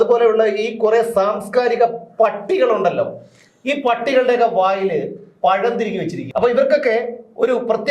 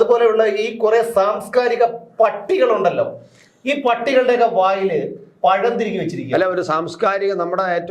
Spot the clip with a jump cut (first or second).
first